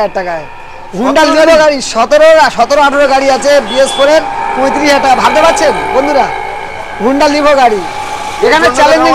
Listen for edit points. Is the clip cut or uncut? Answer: uncut